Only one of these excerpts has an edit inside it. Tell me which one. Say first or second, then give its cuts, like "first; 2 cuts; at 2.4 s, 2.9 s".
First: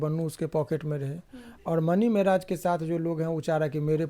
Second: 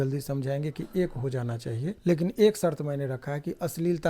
second; 1 cut; at 2.0 s